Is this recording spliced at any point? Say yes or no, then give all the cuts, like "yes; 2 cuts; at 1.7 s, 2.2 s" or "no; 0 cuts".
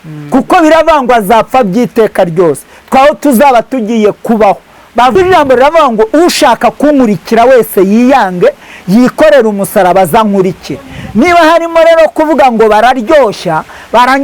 yes; 1 cut; at 5.1 s